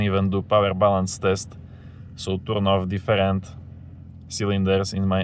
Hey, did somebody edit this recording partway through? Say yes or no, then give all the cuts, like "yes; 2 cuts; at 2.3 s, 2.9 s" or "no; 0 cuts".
no; 0 cuts